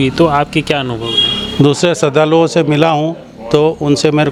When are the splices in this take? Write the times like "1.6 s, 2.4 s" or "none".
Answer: none